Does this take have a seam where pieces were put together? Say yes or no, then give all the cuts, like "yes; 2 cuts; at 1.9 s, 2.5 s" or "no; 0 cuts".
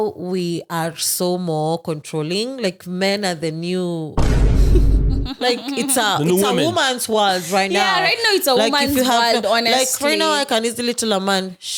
no; 0 cuts